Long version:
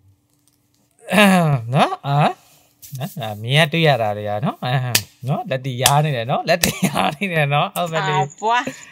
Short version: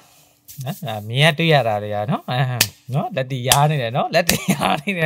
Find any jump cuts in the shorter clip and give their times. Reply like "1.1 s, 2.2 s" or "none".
none